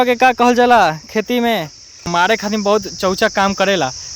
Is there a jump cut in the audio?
yes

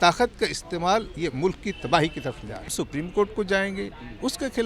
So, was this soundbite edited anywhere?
yes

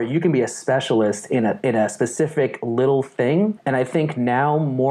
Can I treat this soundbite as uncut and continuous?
no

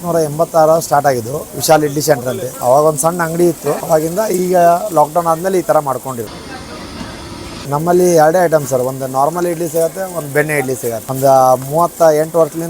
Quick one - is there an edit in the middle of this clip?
yes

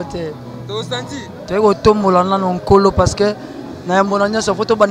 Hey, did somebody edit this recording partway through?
no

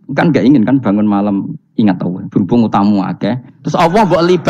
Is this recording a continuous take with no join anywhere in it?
yes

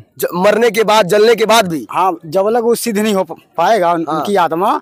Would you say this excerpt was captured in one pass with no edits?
yes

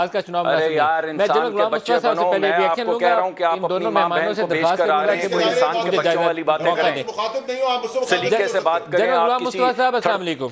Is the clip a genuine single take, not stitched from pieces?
yes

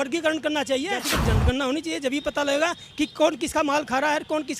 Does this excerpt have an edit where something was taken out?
yes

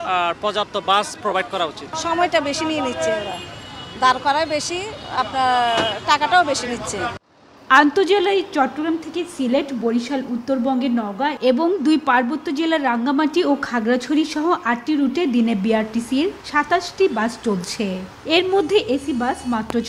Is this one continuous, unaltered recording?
yes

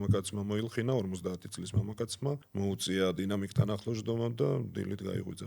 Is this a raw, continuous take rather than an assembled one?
no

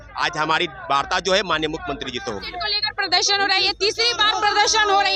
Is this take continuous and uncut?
no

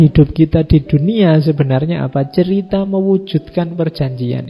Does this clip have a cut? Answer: no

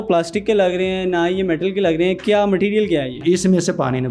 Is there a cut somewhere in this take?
yes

